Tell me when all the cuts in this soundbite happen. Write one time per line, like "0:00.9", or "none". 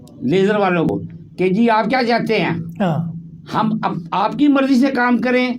0:00.9